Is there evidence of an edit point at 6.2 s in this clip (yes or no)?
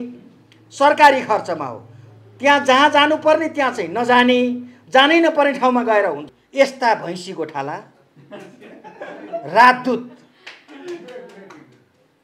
yes